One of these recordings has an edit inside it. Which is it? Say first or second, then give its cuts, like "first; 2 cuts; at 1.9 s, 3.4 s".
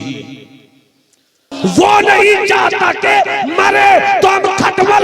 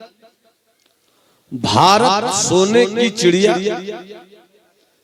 first; 1 cut; at 1.5 s